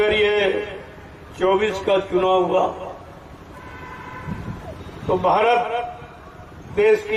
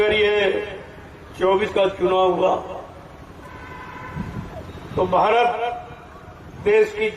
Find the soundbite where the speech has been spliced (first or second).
second